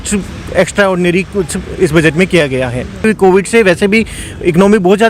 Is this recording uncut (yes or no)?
no